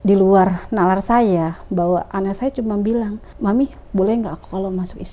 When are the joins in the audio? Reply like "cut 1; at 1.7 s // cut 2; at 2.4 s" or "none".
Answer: cut 1; at 3.2 s